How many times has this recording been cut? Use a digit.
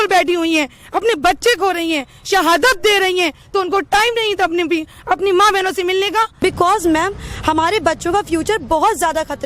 1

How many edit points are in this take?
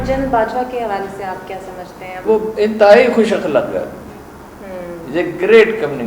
1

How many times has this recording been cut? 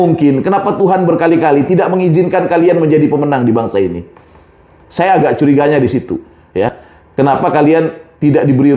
0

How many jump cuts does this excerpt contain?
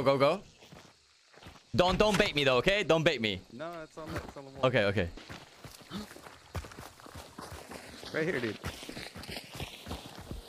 1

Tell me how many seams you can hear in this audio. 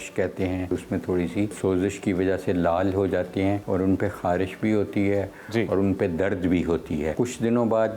4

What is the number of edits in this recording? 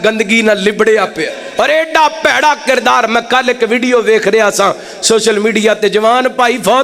1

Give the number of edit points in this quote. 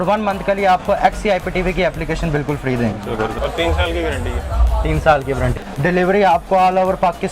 2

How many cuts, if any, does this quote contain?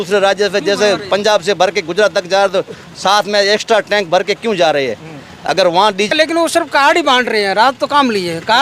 1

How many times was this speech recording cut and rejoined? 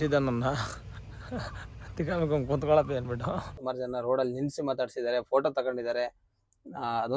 1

